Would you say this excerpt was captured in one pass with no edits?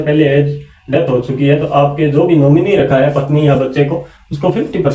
yes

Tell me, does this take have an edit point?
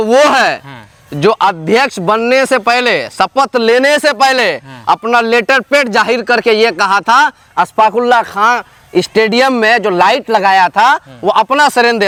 no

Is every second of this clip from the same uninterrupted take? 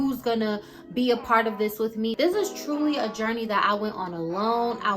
no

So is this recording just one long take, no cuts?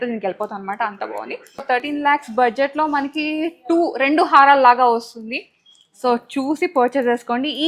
no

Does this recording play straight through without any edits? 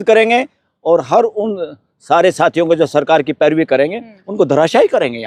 yes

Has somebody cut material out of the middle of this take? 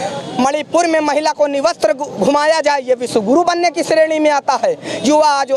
no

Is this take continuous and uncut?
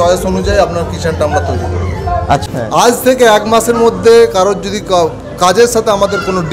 no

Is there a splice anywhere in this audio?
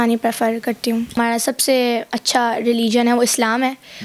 yes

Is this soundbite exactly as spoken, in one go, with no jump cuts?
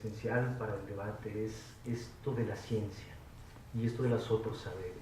no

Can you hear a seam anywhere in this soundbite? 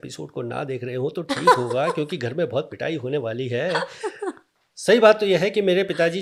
no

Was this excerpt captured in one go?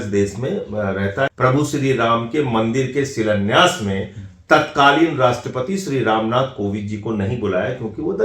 no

